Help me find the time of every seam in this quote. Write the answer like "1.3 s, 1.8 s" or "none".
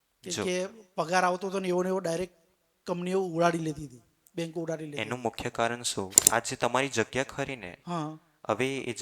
6.2 s

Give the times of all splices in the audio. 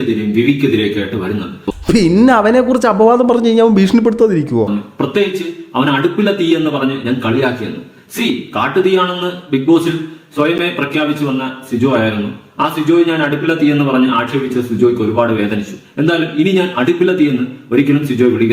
1.7 s, 4.7 s

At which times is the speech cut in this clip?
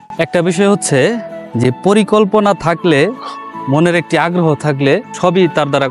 none

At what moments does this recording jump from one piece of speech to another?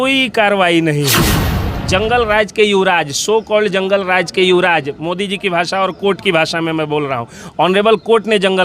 1.7 s

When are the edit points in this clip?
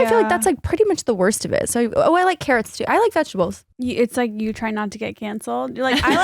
3.7 s

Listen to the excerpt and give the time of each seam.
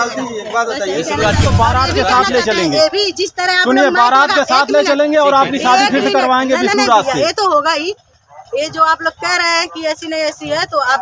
1.4 s

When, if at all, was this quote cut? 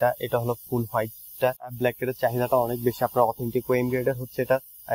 1.7 s

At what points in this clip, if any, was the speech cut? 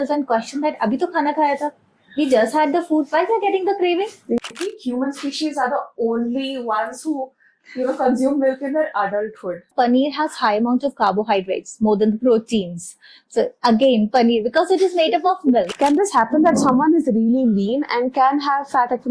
4.4 s, 9.7 s, 15.7 s

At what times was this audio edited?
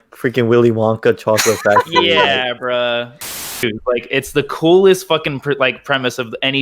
3.5 s

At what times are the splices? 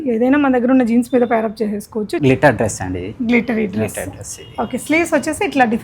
2.1 s

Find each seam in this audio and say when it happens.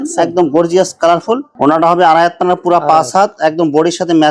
1.5 s

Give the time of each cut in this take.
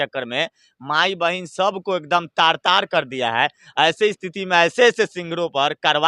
none

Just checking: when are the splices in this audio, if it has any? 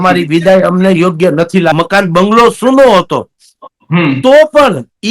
1.7 s

